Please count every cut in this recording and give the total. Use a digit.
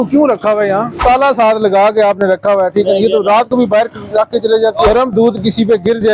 2